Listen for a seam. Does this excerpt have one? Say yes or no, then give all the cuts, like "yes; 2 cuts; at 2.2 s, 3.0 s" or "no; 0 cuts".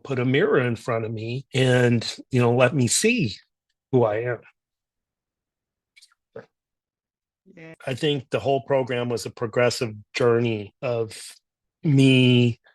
yes; 1 cut; at 7.7 s